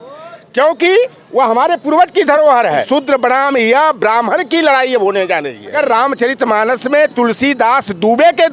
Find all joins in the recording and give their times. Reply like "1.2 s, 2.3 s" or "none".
2.8 s, 5.7 s

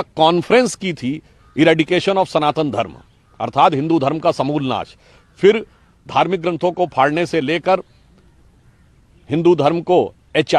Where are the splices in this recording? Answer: none

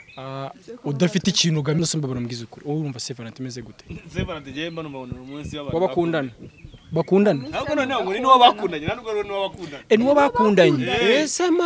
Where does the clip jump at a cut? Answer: 1.8 s

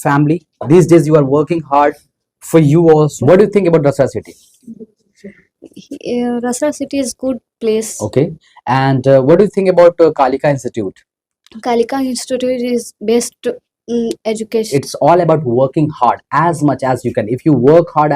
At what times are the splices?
3.2 s, 14.7 s

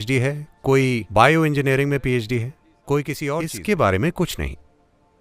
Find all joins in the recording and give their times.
3.4 s

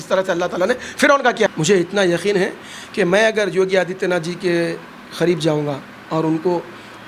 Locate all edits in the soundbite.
1.5 s

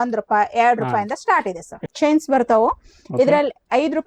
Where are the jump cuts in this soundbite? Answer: none

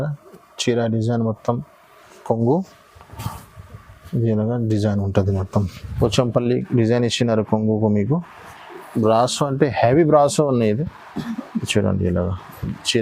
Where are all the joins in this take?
5.8 s

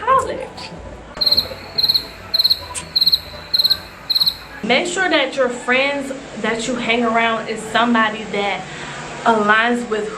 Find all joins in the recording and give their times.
4.6 s

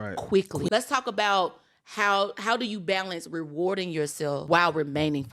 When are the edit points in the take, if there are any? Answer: 0.7 s, 4.4 s

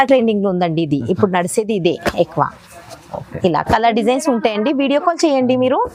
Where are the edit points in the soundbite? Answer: none

